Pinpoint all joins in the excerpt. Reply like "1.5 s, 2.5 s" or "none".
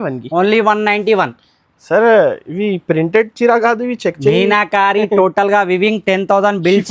none